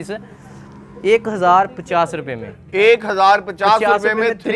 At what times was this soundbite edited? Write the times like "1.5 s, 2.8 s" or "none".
none